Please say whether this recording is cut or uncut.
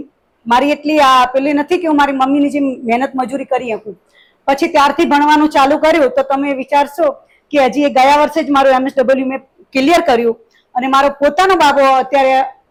uncut